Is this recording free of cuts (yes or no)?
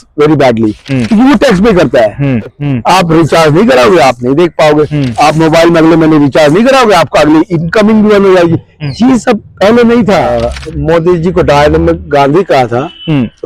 no